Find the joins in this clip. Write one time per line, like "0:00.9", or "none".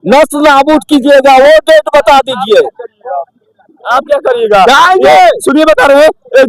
none